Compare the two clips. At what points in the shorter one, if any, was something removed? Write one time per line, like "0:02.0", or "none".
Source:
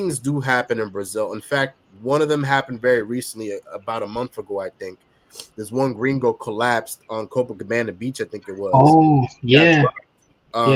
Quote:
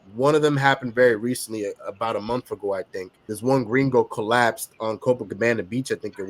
0:03.2